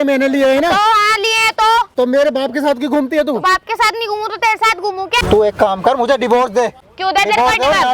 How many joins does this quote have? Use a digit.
3